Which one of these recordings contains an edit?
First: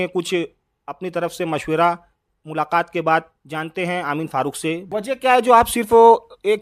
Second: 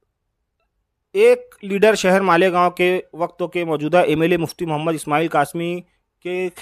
first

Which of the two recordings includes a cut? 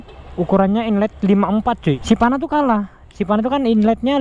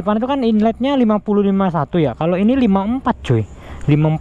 first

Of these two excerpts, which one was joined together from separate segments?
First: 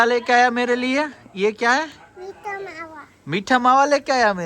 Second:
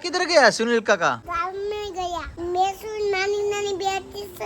second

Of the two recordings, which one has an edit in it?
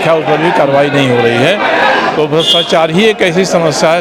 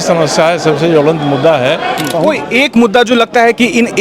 second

